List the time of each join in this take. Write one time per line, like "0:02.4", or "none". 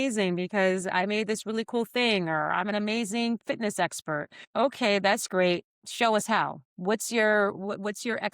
0:04.4
0:05.8
0:06.6